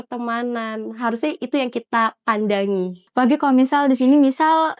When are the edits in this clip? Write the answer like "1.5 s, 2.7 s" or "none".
3.0 s